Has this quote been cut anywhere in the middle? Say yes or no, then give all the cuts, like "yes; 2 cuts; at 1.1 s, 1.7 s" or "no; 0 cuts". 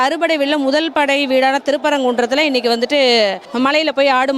yes; 1 cut; at 3.4 s